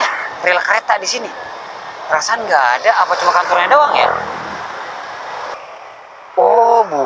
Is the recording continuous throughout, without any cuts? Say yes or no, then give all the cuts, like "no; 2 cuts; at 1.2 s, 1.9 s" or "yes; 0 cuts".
no; 1 cut; at 5.5 s